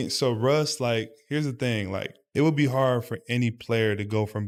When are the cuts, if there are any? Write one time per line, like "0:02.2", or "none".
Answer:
none